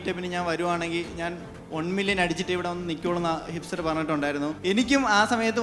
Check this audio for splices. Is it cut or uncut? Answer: cut